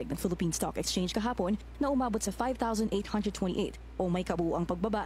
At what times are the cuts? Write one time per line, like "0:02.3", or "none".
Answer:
none